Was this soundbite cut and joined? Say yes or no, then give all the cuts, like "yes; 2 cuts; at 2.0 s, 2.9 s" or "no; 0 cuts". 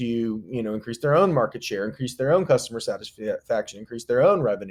no; 0 cuts